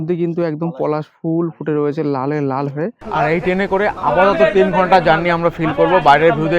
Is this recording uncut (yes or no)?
no